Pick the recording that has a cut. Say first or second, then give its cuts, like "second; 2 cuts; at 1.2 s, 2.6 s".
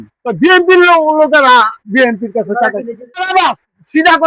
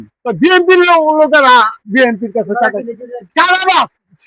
first; 1 cut; at 3.2 s